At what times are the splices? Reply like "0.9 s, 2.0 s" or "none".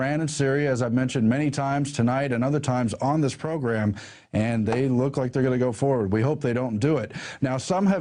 2.9 s